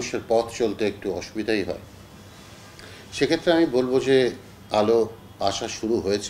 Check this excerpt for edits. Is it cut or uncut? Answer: uncut